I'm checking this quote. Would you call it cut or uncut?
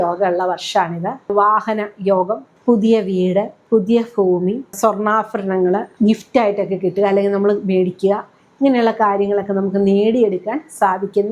cut